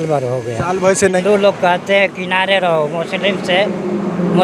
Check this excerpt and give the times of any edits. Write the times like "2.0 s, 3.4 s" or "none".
1.2 s